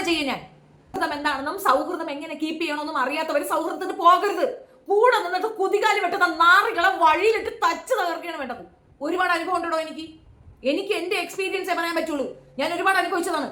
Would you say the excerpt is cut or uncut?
cut